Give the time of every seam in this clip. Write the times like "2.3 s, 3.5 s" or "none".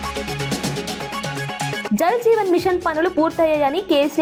none